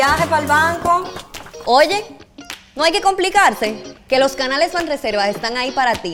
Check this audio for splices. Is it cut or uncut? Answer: uncut